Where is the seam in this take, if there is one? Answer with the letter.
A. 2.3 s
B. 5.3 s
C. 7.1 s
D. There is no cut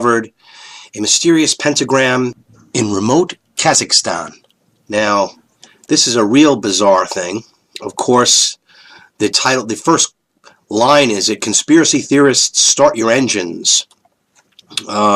B